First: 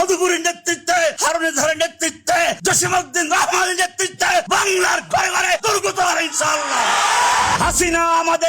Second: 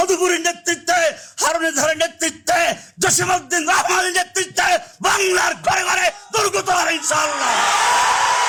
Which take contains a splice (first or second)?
first